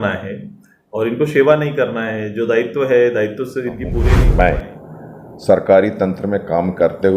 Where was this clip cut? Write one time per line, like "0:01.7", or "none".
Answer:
0:04.0